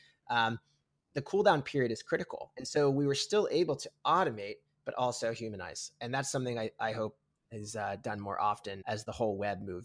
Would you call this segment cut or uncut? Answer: cut